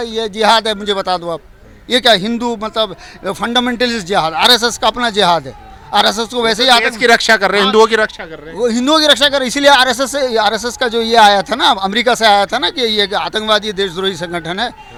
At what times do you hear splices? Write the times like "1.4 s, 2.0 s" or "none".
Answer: none